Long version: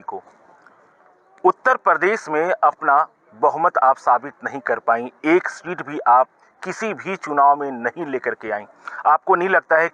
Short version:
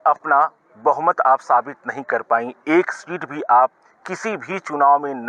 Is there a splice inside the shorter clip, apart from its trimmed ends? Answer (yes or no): no